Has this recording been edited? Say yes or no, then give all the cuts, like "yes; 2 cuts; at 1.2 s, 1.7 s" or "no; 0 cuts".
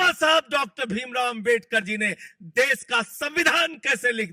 no; 0 cuts